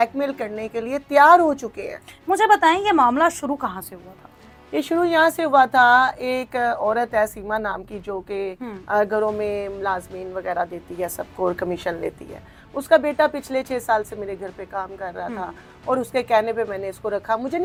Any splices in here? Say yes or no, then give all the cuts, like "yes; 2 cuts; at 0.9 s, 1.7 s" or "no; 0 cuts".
no; 0 cuts